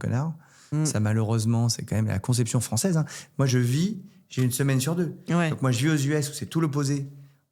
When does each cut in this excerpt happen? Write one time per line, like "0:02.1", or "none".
none

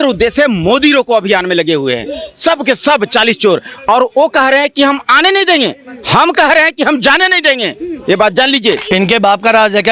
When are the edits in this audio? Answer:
0:08.8

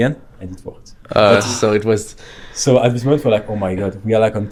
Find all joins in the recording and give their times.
none

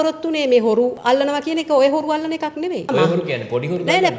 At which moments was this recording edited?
0:01.0
0:02.9

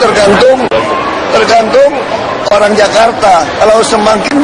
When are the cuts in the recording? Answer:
0:01.7

